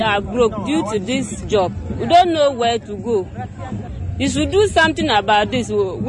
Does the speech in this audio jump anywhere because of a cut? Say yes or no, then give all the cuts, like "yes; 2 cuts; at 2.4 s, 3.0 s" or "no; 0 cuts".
yes; 1 cut; at 3.9 s